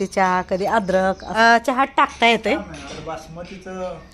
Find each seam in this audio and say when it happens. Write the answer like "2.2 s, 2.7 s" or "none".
1.2 s, 2.7 s

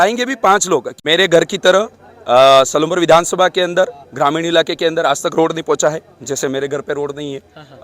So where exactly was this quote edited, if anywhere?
0.9 s

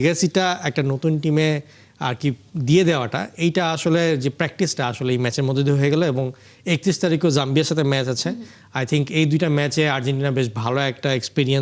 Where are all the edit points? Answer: none

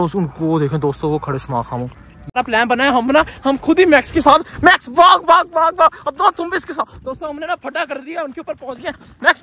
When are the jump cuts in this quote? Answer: none

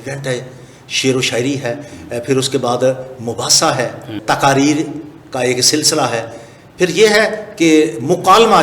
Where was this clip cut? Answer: 4.2 s

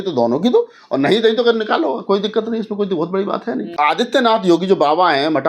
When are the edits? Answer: 3.7 s

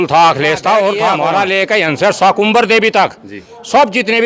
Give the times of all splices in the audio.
1.2 s

